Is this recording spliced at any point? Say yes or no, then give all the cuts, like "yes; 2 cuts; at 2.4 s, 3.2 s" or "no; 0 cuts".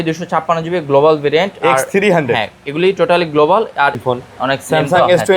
yes; 1 cut; at 4.0 s